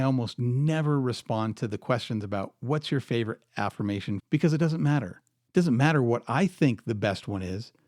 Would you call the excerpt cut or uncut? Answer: cut